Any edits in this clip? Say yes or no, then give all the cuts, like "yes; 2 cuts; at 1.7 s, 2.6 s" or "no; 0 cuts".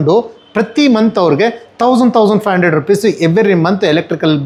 no; 0 cuts